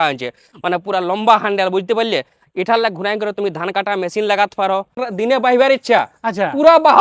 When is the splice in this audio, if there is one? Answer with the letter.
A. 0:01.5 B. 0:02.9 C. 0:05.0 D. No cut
C